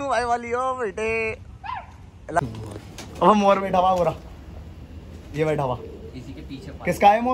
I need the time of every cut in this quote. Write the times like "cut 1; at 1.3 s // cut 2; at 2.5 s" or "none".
cut 1; at 2.4 s